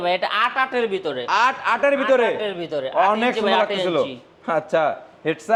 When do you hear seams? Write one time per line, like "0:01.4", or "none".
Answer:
none